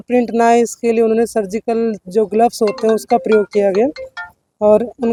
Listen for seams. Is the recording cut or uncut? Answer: uncut